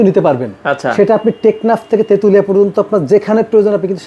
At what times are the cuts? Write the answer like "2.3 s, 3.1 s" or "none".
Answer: none